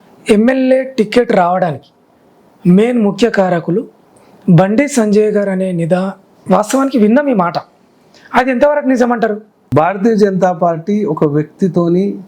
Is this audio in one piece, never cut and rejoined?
no; 1 cut; at 9.5 s

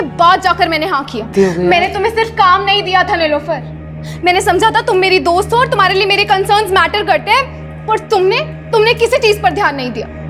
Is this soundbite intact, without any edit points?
no; 1 cut; at 1.3 s

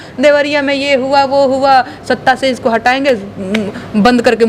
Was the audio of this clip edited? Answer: no; 0 cuts

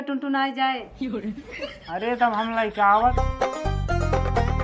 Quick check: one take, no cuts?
no; 1 cut; at 3.1 s

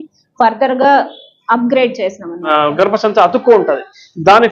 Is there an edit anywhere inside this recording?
yes; 1 cut; at 2.3 s

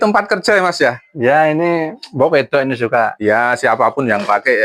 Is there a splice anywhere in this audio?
no; 0 cuts

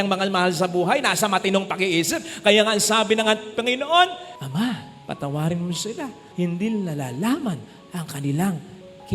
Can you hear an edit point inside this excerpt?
no; 0 cuts

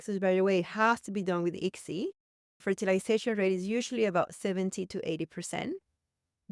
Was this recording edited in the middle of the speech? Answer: yes; 1 cut; at 2.2 s

